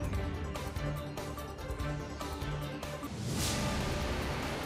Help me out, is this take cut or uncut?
uncut